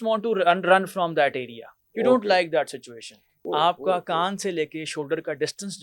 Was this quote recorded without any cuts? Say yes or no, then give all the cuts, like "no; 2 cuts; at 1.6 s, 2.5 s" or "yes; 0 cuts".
no; 1 cut; at 3.3 s